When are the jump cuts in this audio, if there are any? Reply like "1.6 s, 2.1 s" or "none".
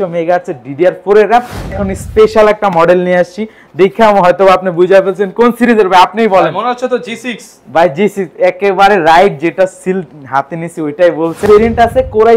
1.8 s, 11.5 s